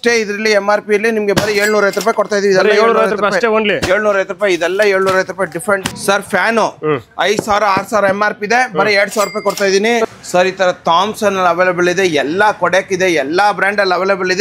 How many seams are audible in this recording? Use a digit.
2